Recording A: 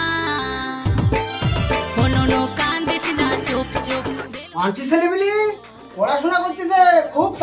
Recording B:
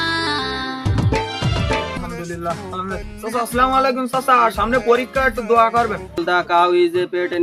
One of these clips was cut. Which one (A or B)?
B